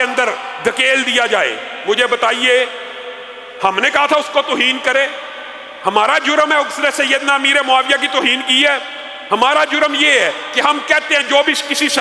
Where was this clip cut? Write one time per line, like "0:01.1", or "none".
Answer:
none